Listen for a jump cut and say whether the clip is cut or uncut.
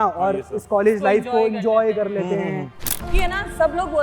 cut